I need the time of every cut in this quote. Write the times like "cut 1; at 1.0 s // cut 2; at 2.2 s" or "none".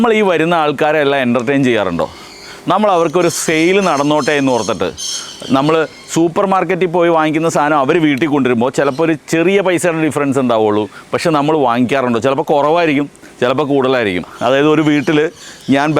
cut 1; at 14.3 s